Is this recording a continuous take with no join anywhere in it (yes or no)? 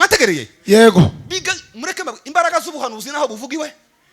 yes